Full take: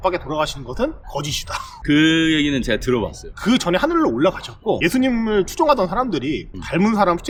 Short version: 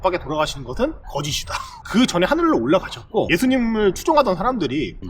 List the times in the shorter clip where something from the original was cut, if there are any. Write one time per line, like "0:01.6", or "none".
0:01.7